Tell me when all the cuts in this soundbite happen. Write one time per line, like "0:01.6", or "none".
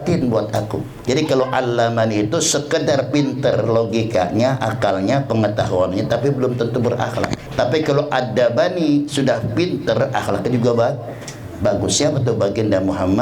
0:01.0
0:07.4